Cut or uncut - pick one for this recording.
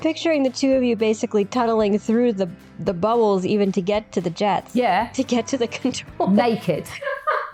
uncut